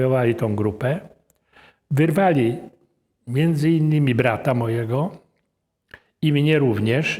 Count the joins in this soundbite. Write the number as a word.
zero